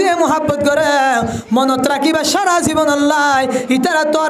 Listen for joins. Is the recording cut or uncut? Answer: uncut